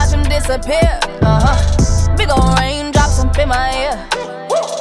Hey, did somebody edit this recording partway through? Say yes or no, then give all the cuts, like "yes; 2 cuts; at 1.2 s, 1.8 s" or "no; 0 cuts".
no; 0 cuts